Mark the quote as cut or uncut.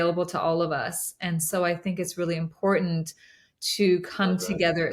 uncut